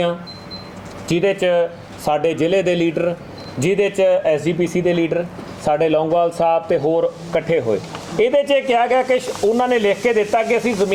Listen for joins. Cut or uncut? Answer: uncut